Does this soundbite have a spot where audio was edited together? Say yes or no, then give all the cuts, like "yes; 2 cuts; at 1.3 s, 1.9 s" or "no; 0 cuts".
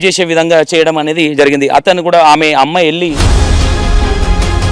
yes; 1 cut; at 3.2 s